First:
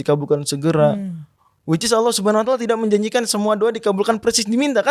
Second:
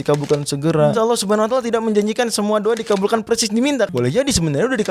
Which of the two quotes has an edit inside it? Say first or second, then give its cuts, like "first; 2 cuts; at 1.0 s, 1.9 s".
second; 2 cuts; at 0.9 s, 3.9 s